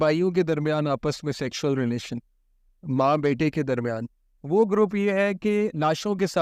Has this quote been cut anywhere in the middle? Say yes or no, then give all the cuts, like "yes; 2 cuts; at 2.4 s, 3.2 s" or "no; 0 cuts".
yes; 1 cut; at 4.1 s